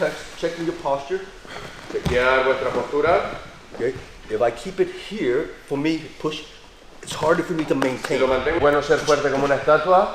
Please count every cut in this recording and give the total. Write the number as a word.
one